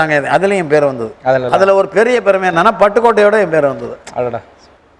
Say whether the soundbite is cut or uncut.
uncut